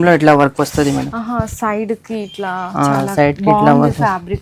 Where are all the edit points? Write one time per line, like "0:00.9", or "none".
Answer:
none